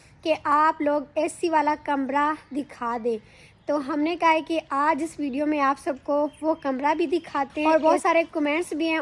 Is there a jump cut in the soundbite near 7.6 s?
yes; 1 cut; at 7.6 s

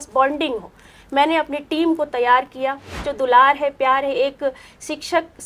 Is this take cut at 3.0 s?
yes; 1 cut; at 3.0 s

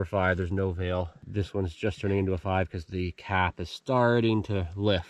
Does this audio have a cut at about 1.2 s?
yes; 1 cut; at 1.2 s

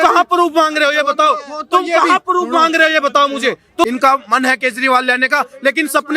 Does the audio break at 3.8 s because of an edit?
yes; 1 cut; at 3.8 s

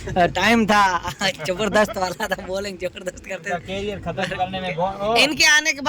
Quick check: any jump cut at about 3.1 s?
no; 0 cuts

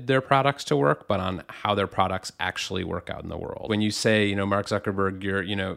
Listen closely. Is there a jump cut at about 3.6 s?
yes; 1 cut; at 3.6 s

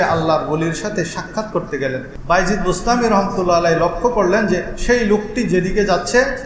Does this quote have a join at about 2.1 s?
yes; 1 cut; at 2.1 s

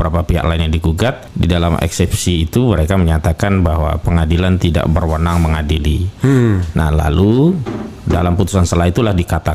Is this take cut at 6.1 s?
no; 0 cuts

